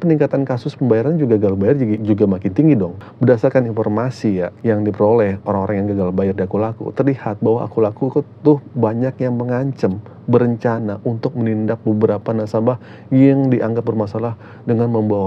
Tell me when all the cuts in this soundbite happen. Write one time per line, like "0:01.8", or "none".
0:02.0
0:03.0
0:04.5